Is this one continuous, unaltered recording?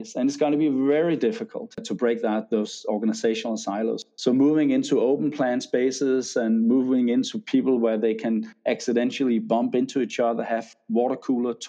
no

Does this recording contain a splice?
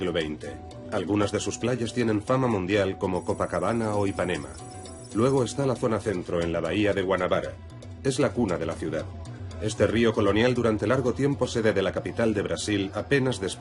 yes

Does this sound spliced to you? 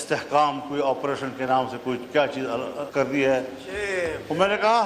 yes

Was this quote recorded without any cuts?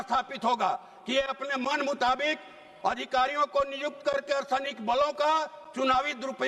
yes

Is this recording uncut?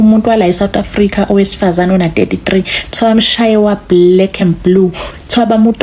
yes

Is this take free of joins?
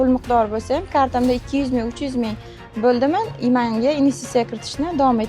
yes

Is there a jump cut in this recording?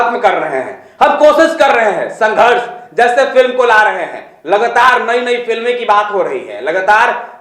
no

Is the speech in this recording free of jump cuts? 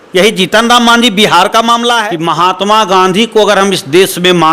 no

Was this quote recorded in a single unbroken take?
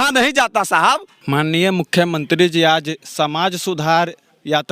no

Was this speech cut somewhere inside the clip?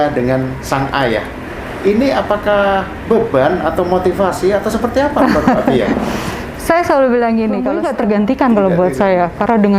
yes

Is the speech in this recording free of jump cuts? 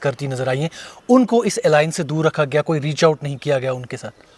yes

